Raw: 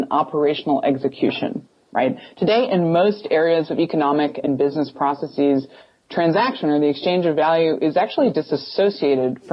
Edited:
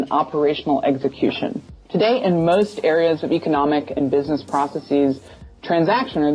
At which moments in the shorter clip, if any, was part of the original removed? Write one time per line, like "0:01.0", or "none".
0:01.8

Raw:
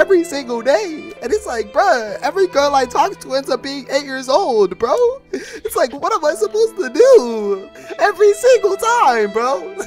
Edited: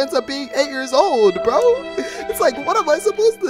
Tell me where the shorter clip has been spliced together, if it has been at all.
none

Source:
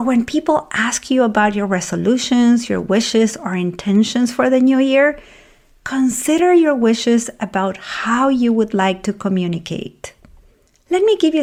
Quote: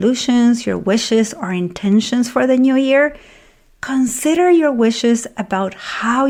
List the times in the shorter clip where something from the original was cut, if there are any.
none

